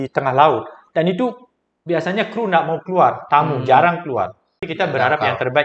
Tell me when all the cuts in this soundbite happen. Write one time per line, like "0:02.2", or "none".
0:04.7